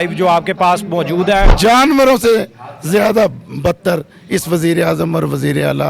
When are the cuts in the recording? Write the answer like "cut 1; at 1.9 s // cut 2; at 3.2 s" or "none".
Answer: cut 1; at 1.5 s

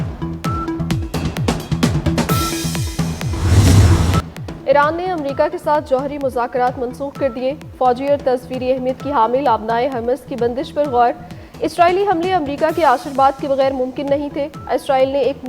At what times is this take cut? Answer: cut 1; at 3.5 s

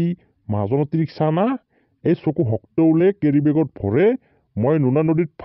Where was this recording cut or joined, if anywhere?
none

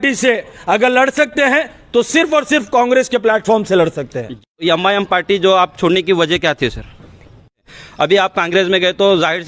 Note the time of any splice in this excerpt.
cut 1; at 4.5 s // cut 2; at 7.6 s

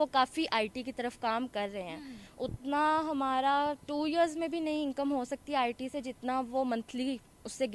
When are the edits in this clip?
none

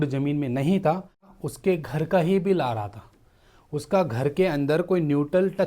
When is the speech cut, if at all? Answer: cut 1; at 1.3 s

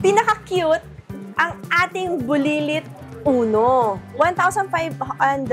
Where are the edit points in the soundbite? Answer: cut 1; at 4.0 s

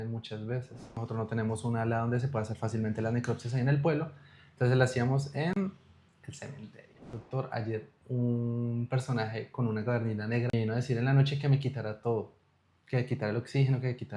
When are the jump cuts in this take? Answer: cut 1; at 1.1 s // cut 2; at 7.2 s // cut 3; at 10.5 s

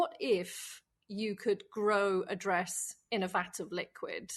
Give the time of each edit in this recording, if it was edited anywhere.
none

